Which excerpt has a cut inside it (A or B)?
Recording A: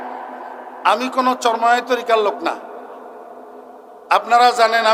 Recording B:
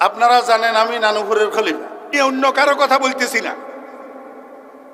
B